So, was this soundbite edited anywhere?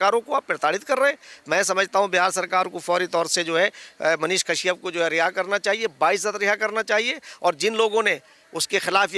no; 0 cuts

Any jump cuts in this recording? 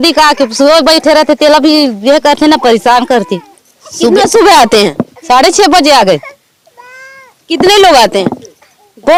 no; 0 cuts

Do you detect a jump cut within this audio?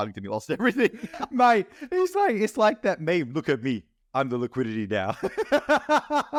no; 0 cuts

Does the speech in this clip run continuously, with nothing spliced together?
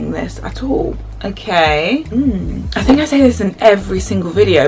no; 2 cuts; at 1.1 s, 2.6 s

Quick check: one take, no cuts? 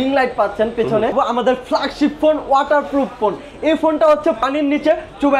no; 2 cuts; at 1.1 s, 4.4 s

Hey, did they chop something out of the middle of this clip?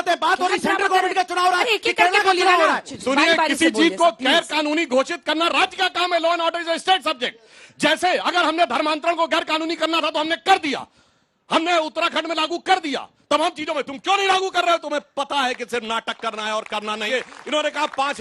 yes; 2 cuts; at 2.9 s, 17.1 s

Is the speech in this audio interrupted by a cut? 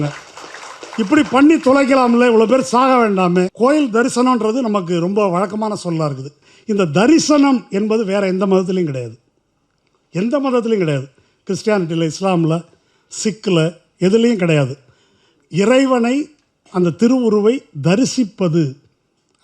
yes; 1 cut; at 3.5 s

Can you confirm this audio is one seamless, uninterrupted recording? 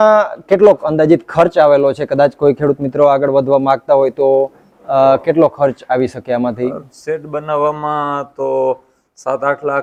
yes; 0 cuts

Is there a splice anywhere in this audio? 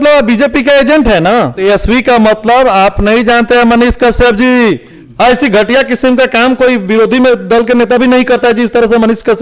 yes; 2 cuts; at 1.6 s, 4.9 s

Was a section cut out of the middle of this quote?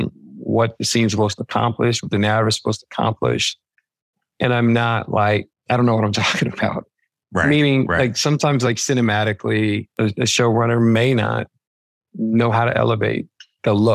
yes; 2 cuts; at 5.5 s, 9.9 s

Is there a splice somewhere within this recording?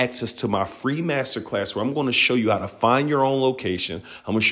no; 0 cuts

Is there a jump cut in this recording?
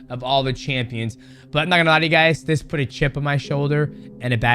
yes; 1 cut; at 1.3 s

